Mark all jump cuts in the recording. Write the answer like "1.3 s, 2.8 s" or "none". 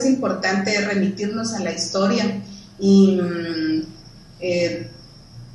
1.0 s